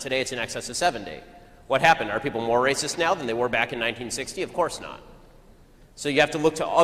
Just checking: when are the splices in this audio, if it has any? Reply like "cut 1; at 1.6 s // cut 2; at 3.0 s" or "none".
none